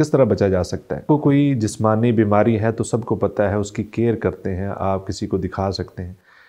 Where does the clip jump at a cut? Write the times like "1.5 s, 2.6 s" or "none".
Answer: 1.0 s